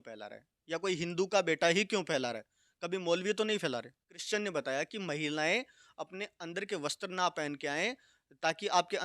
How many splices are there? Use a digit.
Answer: 1